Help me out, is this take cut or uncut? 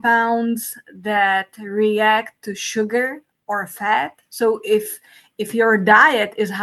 uncut